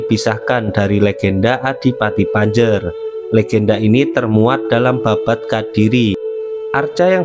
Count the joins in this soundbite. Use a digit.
1